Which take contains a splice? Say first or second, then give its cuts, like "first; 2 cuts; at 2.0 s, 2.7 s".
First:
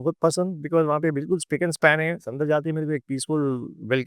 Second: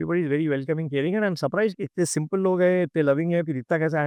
first; 1 cut; at 2.3 s